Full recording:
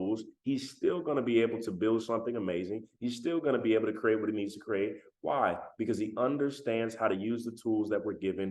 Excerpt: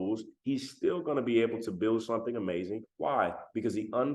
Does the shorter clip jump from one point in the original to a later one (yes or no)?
yes